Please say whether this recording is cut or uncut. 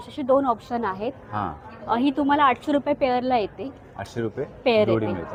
uncut